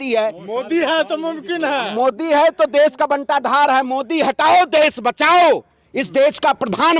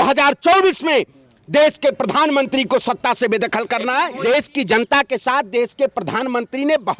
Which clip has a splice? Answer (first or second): second